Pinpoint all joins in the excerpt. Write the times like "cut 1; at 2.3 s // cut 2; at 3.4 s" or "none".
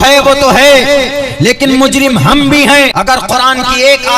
cut 1; at 2.9 s

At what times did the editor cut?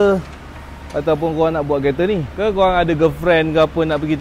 cut 1; at 2.3 s

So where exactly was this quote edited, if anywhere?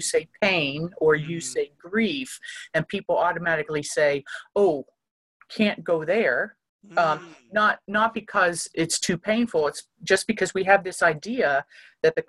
none

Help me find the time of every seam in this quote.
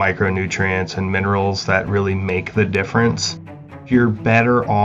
cut 1; at 3.8 s

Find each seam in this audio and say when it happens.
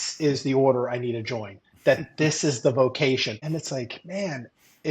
cut 1; at 3.4 s

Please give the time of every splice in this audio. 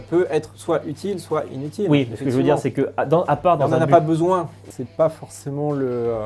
cut 1; at 4.5 s

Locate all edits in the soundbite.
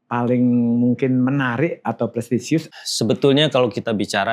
cut 1; at 2.7 s

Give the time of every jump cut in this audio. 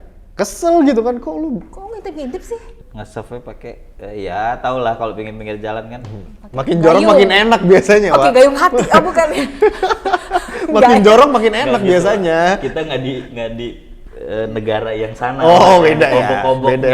cut 1; at 2.8 s

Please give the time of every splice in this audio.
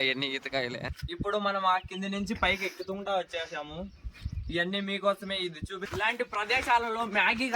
cut 1; at 1.0 s // cut 2; at 5.8 s

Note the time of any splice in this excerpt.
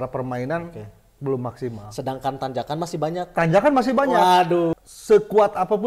cut 1; at 4.8 s

